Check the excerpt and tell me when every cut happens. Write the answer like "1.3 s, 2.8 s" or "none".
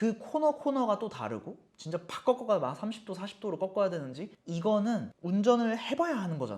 1.6 s